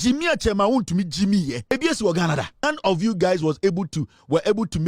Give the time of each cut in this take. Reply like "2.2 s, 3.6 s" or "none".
1.7 s, 2.6 s